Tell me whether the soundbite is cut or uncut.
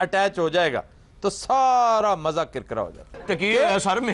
cut